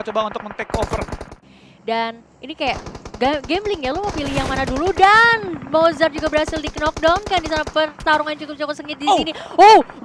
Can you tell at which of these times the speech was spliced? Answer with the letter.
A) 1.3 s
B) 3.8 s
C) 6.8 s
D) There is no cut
A